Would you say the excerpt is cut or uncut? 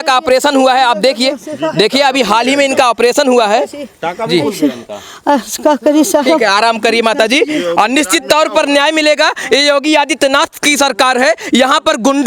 uncut